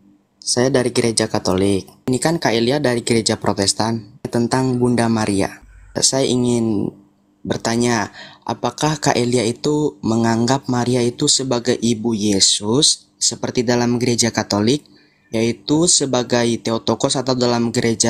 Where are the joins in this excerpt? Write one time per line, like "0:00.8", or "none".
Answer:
0:02.1
0:04.3
0:05.8